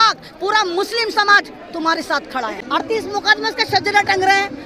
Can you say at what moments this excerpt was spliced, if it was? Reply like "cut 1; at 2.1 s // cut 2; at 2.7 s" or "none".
cut 1; at 2.6 s